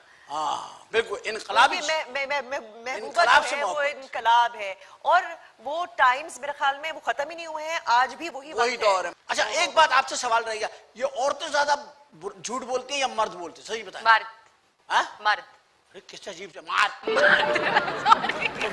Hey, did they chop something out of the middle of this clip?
no; 0 cuts

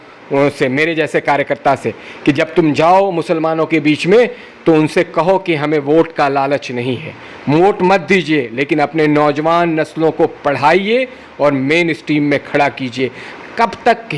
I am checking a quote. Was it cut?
no; 0 cuts

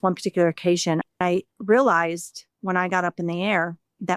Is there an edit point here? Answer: yes; 1 cut; at 1.2 s

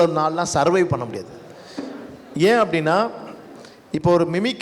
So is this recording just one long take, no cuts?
yes; 0 cuts

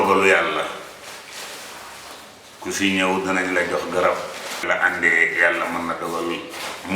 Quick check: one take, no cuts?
no; 1 cut; at 4.7 s

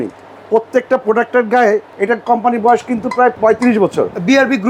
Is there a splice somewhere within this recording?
yes; 2 cuts; at 1.9 s, 3.4 s

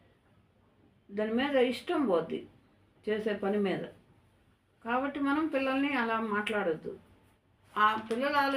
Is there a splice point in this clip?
yes; 1 cut; at 7.6 s

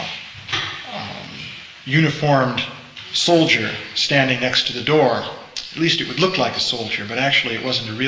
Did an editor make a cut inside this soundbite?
yes; 1 cut; at 3.9 s

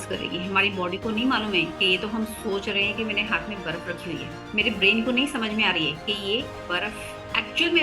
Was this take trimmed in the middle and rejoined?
yes; 2 cuts; at 4.4 s, 6.6 s

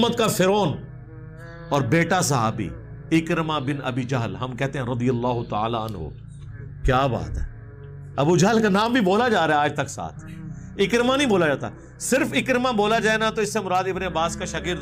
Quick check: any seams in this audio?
no; 0 cuts

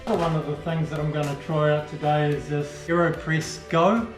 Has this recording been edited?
yes; 1 cut; at 2.8 s

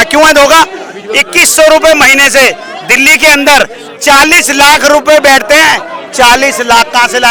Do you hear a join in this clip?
no; 0 cuts

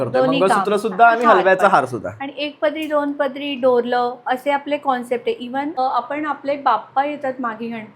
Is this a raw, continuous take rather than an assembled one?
no; 1 cut; at 5.8 s

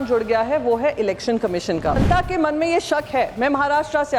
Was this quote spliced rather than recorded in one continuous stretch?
yes; 1 cut; at 2.0 s

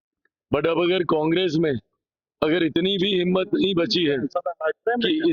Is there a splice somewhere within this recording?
no; 0 cuts

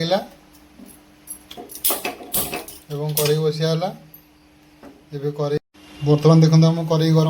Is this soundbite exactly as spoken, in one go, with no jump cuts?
no; 1 cut; at 5.6 s

